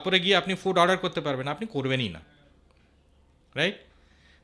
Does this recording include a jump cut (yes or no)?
no